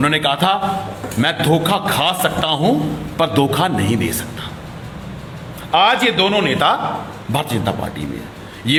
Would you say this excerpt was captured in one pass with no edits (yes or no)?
yes